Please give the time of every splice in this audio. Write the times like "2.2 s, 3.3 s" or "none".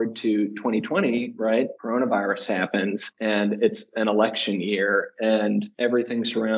1.8 s